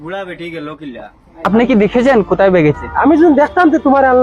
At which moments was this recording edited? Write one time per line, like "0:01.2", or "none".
0:01.5